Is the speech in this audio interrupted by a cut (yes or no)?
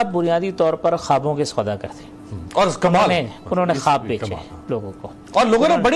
no